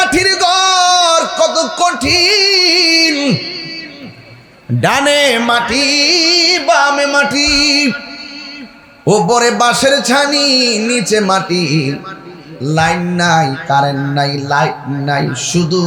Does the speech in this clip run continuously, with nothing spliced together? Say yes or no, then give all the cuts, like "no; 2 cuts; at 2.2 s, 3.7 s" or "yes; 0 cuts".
yes; 0 cuts